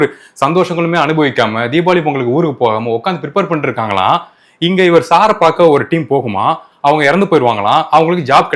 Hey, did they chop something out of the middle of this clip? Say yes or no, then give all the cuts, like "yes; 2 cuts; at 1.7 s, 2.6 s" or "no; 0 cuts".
no; 0 cuts